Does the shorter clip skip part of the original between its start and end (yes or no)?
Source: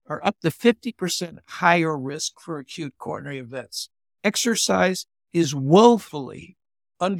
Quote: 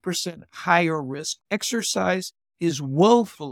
yes